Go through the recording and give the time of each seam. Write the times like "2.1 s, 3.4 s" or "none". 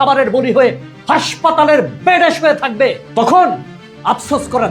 3.0 s